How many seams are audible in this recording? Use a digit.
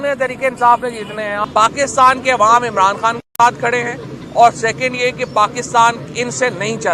1